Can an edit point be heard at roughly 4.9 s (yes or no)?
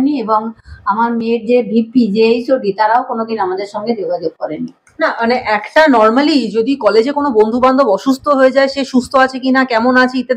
no